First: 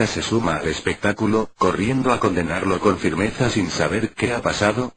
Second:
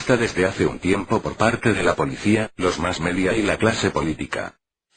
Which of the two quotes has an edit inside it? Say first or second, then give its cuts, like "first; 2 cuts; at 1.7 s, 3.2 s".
first; 1 cut; at 1.4 s